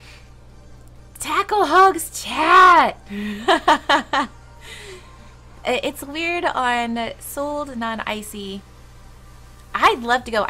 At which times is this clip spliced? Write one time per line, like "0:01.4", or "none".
0:03.4